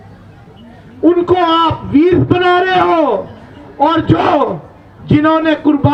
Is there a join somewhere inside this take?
no; 0 cuts

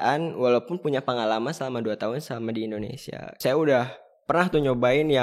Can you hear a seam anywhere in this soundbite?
yes; 1 cut; at 3.3 s

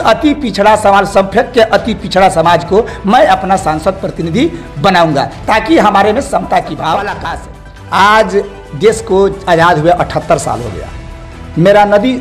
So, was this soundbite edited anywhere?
yes; 1 cut; at 7.3 s

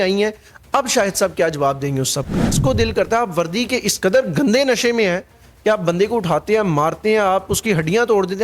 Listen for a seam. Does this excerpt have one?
yes; 1 cut; at 2.5 s

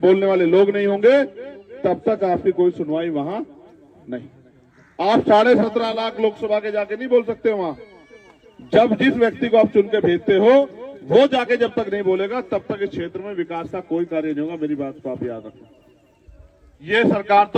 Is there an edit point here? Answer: no; 0 cuts

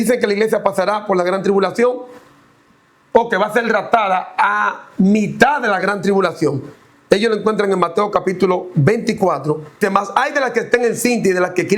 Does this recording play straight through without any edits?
no; 1 cut; at 9.8 s

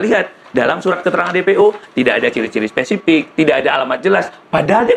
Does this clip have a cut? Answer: no; 0 cuts

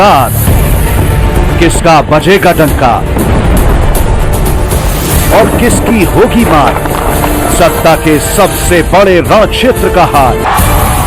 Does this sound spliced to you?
no; 0 cuts

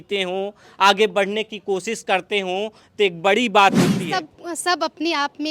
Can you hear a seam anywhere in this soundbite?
yes; 1 cut; at 4.0 s

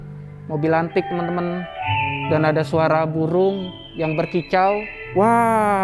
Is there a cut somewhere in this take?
yes; 2 cuts; at 1.8 s, 5.0 s

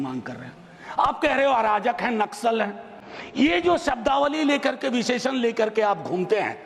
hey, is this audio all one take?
yes; 0 cuts

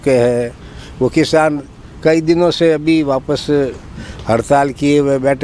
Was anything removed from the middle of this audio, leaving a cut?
no; 0 cuts

